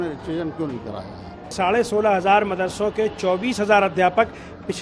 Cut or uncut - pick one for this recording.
cut